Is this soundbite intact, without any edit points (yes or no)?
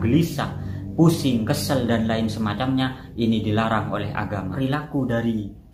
no